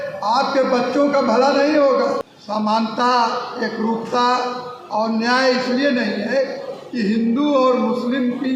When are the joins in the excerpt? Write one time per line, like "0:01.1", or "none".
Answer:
0:02.3